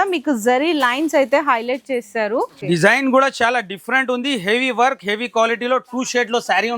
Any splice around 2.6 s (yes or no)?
yes